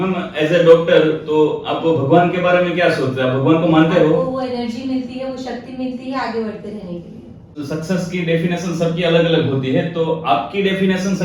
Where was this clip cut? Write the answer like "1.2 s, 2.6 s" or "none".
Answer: 4.2 s